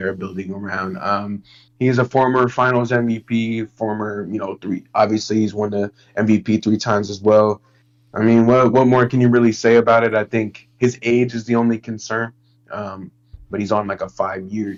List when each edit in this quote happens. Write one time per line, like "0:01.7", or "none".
none